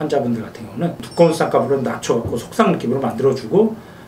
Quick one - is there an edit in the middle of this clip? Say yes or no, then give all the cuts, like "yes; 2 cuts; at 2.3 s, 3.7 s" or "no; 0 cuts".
yes; 1 cut; at 1.1 s